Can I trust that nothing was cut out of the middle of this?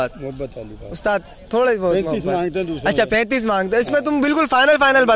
yes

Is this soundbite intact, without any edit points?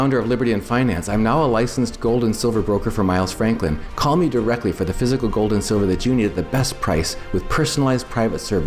yes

